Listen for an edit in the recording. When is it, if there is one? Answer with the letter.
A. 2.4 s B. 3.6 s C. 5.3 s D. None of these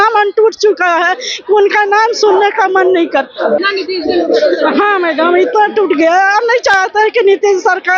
B